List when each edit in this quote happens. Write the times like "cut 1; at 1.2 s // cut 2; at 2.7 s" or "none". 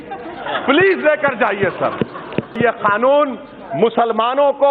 cut 1; at 2.6 s